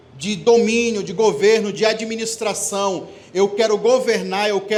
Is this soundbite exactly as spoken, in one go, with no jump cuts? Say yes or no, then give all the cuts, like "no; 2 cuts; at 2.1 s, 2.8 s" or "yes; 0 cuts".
yes; 0 cuts